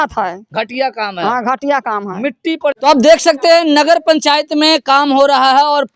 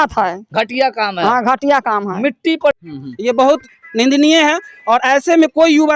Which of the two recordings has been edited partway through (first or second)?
second